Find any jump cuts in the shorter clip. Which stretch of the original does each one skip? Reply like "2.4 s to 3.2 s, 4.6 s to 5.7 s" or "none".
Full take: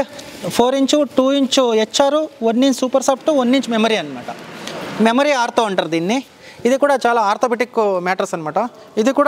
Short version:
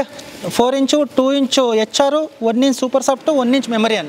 none